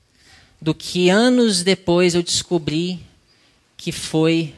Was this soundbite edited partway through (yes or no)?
no